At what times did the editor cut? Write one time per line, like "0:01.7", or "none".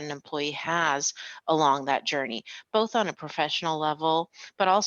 none